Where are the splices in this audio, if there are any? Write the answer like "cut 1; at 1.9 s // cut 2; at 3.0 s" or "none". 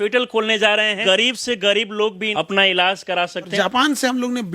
cut 1; at 1.0 s // cut 2; at 2.2 s // cut 3; at 3.5 s